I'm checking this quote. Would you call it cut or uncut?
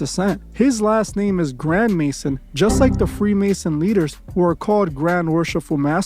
uncut